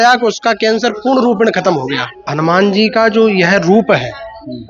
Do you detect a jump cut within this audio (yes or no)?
yes